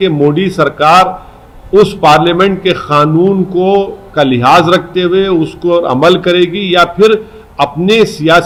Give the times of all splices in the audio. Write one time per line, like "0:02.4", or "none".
none